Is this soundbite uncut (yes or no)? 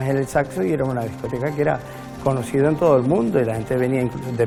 yes